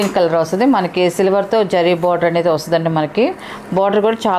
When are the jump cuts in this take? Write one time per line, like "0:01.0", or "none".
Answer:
none